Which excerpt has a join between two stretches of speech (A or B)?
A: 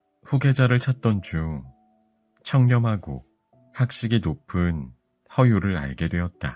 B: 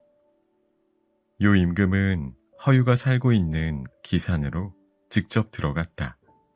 B